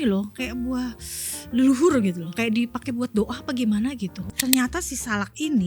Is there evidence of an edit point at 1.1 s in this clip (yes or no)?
no